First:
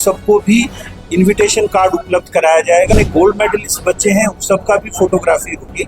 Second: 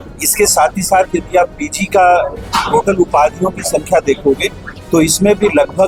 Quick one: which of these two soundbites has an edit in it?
first; 1 cut; at 2.9 s

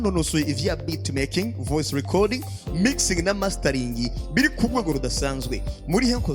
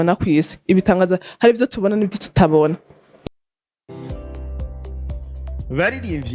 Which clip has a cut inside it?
second; 1 cut; at 3.2 s

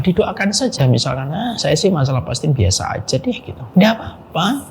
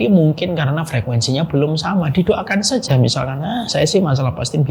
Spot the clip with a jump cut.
first; 1 cut; at 3.5 s

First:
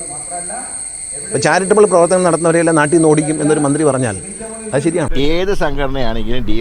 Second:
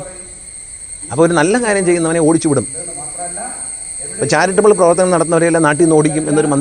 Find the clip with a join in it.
first; 1 cut; at 5.1 s

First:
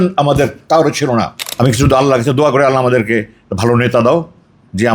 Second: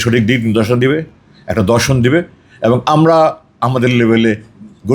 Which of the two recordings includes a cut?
first; 1 cut; at 1.4 s

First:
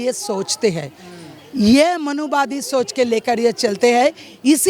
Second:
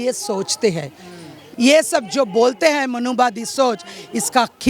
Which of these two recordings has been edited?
second; 1 cut; at 1.4 s

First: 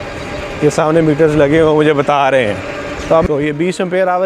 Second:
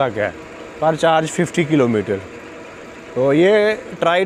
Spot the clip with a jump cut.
first; 1 cut; at 3.2 s

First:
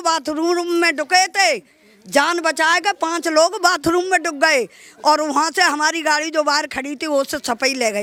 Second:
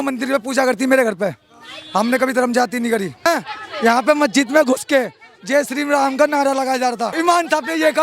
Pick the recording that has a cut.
second; 2 cuts; at 3.7 s, 7.1 s

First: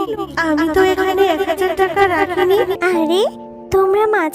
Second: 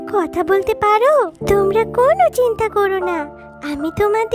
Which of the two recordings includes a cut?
first; 1 cut; at 2.8 s

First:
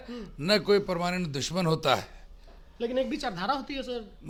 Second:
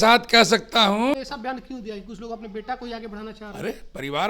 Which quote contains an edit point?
second; 1 cut; at 1.2 s

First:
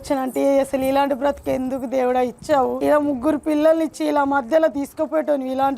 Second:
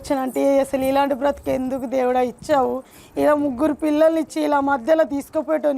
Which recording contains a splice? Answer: first; 1 cut; at 2.8 s

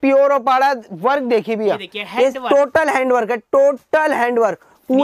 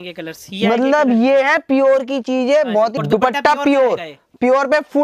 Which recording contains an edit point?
second; 1 cut; at 3.0 s

